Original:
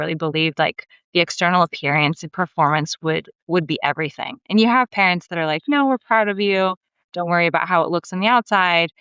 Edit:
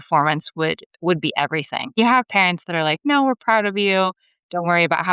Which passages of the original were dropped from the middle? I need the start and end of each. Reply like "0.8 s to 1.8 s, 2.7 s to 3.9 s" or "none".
4.4 s to 4.6 s